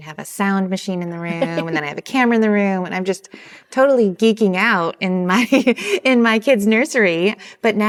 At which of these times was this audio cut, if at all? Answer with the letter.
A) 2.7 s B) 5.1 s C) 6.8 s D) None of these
D